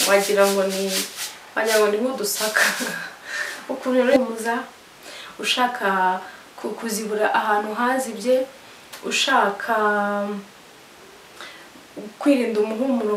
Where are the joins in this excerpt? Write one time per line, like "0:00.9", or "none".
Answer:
0:04.2